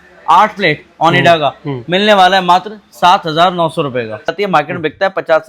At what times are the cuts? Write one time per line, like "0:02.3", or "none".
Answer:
0:04.3